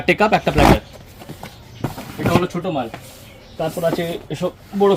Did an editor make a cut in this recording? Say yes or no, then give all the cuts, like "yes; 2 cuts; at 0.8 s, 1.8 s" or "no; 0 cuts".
no; 0 cuts